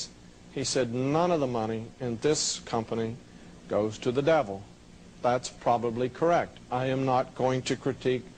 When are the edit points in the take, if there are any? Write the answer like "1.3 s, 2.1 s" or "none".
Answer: 4.9 s